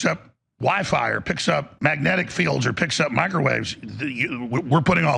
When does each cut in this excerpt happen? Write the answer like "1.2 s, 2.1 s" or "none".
1.7 s